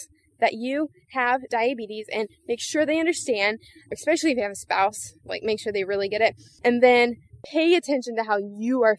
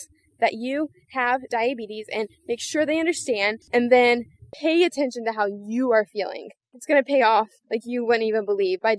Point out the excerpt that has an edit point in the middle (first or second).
second